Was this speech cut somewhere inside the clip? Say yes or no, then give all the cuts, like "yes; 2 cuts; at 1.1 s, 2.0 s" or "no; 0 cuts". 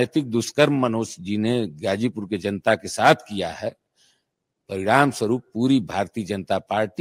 no; 0 cuts